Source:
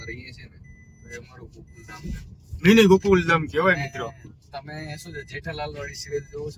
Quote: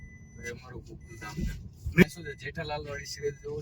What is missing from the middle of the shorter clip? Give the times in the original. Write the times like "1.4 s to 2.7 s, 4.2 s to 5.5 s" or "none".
2.7 s to 4.9 s